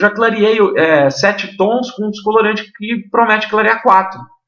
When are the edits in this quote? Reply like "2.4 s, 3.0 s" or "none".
none